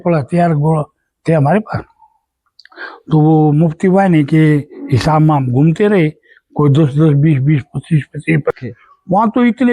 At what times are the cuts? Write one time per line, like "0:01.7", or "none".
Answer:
0:08.5